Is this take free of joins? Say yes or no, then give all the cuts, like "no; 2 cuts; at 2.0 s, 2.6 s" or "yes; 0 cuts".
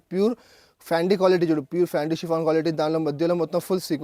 yes; 0 cuts